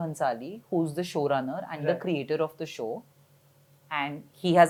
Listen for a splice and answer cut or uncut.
uncut